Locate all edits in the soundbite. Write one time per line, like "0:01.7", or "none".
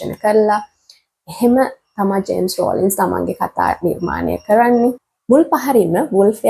0:05.1